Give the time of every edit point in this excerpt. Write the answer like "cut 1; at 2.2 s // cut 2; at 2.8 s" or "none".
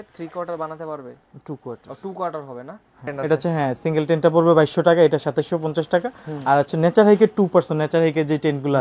cut 1; at 3.1 s